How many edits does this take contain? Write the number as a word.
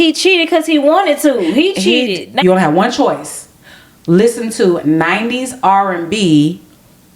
one